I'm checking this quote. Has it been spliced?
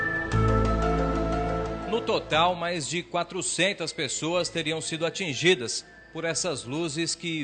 yes; 1 cut; at 1.8 s

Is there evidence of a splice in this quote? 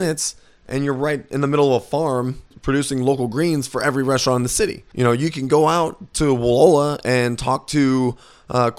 yes; 2 cuts; at 2.6 s, 4.8 s

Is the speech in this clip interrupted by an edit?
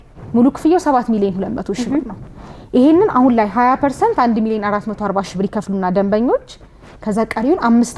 no; 0 cuts

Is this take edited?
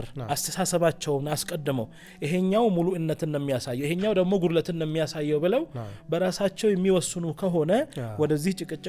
no; 0 cuts

